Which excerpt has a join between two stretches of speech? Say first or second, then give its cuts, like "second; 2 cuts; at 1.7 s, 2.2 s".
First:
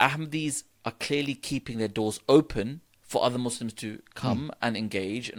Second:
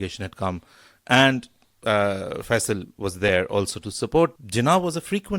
second; 1 cut; at 4.4 s